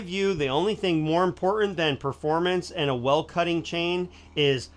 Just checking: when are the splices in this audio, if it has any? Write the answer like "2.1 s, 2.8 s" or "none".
none